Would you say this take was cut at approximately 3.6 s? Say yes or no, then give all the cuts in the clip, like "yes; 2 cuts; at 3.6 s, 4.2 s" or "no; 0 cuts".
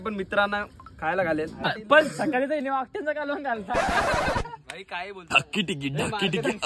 no; 2 cuts; at 1.7 s, 5.3 s